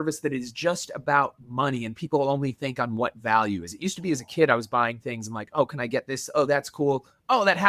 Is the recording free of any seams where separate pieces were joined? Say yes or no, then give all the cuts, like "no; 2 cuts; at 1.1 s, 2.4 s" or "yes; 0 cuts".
yes; 0 cuts